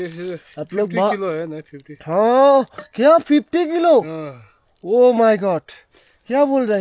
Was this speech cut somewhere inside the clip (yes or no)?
no